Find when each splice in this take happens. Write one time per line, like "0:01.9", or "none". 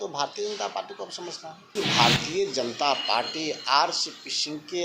0:01.7